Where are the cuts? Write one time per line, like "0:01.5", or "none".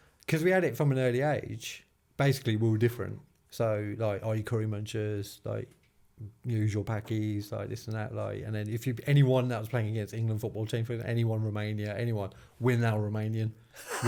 none